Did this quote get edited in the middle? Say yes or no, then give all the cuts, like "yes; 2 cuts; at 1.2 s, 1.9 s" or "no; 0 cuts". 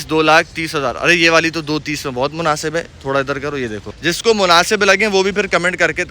yes; 1 cut; at 3.9 s